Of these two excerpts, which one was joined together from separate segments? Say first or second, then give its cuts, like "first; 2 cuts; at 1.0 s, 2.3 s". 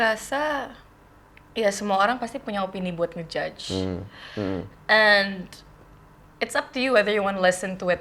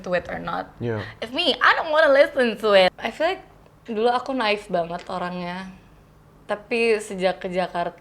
second; 1 cut; at 2.9 s